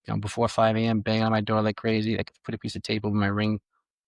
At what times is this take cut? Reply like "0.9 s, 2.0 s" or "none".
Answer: none